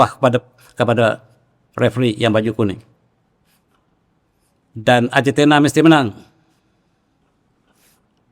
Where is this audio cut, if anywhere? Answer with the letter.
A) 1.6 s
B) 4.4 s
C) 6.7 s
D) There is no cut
D